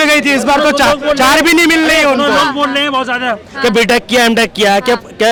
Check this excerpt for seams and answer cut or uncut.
uncut